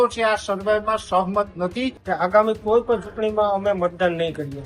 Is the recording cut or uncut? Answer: cut